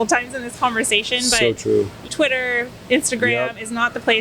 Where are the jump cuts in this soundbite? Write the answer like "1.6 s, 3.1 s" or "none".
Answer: 2.0 s